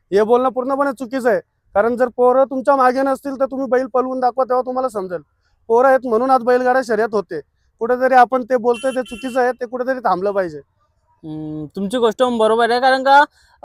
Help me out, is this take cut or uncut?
uncut